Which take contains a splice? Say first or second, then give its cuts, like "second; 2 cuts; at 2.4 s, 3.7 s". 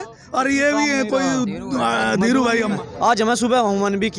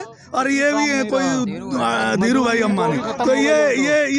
first; 1 cut; at 2.8 s